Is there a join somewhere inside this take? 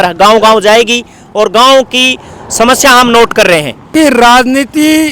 yes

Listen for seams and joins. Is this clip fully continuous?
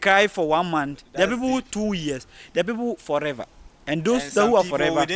yes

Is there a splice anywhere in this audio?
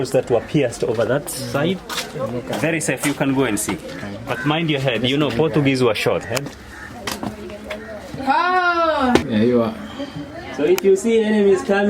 yes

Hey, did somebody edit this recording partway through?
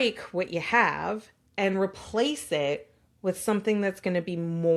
no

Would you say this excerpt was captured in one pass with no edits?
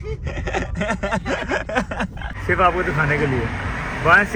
yes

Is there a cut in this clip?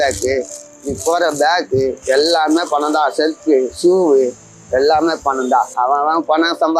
yes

